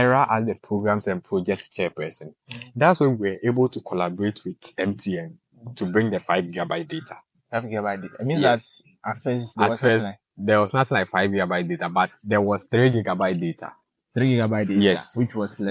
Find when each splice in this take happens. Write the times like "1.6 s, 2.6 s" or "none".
none